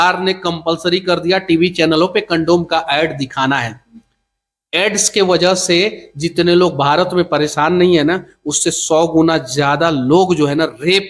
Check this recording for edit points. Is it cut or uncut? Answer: uncut